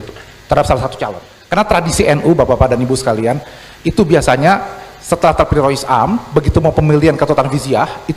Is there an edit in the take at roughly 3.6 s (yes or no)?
no